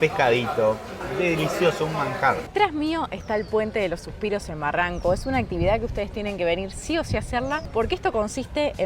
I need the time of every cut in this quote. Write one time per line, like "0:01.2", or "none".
0:02.5